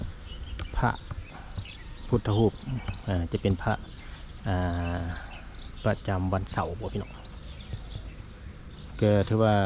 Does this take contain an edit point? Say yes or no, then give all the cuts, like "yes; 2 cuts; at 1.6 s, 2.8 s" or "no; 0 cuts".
no; 0 cuts